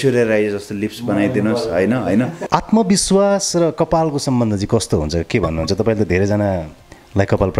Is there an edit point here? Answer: yes; 1 cut; at 2.4 s

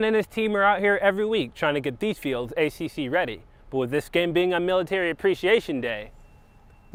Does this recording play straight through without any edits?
yes; 0 cuts

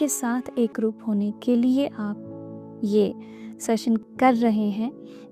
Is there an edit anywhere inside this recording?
yes; 1 cut; at 4.0 s

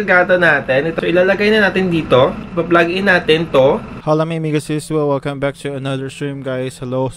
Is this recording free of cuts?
no; 1 cut; at 3.9 s

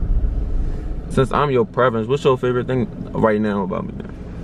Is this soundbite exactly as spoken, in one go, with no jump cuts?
no; 1 cut; at 1.0 s

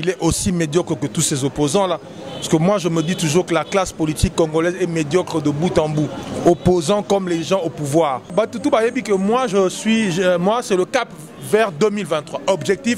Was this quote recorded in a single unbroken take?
no; 1 cut; at 8.3 s

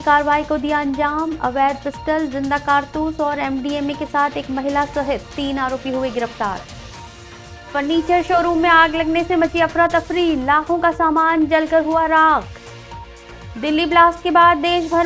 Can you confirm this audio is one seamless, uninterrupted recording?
yes; 0 cuts

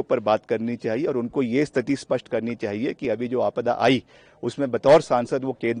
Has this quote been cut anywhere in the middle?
no; 0 cuts

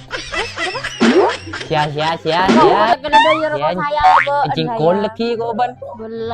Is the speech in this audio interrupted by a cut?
yes; 1 cut; at 2.5 s

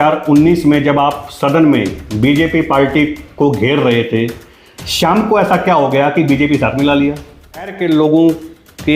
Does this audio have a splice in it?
yes; 1 cut; at 7.7 s

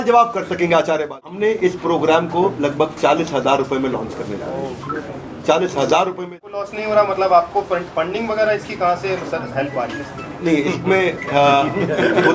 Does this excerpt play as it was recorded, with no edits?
no; 2 cuts; at 1.4 s, 6.4 s

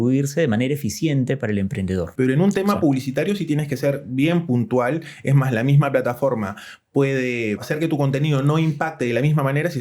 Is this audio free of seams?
no; 2 cuts; at 2.1 s, 7.7 s

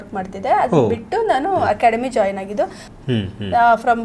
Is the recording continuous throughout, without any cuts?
no; 1 cut; at 2.9 s

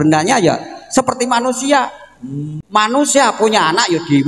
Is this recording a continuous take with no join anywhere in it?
no; 1 cut; at 2.6 s

